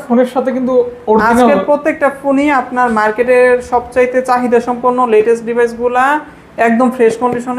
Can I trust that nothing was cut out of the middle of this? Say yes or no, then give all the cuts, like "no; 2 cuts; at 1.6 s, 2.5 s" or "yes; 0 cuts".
yes; 0 cuts